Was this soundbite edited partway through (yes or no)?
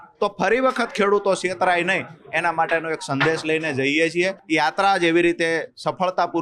yes